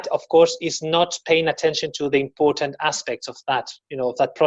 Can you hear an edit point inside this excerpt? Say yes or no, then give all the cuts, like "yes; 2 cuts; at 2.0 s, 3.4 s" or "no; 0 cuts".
no; 0 cuts